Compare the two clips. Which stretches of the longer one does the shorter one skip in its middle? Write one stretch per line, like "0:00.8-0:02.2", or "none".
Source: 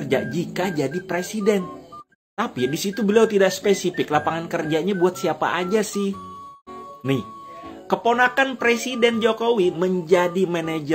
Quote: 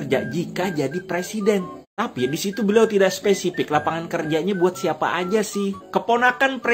0:01.8-0:02.2
0:06.2-0:07.8